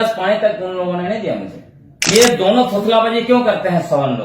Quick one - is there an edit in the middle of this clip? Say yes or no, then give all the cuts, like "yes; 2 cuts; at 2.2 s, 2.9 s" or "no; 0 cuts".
yes; 1 cut; at 2.0 s